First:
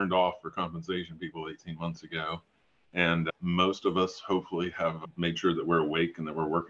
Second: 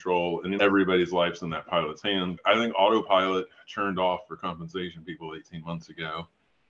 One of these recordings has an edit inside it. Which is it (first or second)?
second